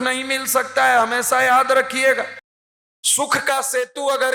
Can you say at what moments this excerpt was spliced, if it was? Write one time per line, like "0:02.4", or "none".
none